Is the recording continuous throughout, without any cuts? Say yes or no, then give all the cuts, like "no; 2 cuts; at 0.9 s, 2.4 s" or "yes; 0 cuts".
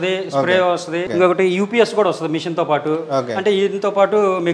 no; 1 cut; at 1.1 s